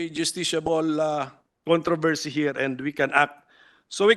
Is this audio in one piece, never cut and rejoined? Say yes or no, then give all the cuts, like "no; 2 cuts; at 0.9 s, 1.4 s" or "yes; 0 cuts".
yes; 0 cuts